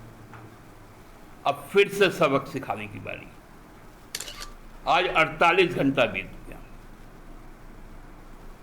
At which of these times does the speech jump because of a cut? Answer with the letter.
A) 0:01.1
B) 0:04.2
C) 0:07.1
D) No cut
B